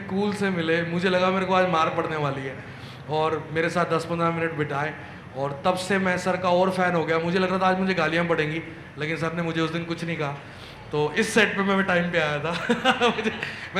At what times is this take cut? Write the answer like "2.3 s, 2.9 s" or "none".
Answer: none